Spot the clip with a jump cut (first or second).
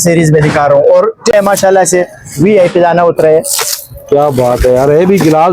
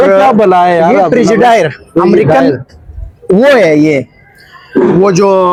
first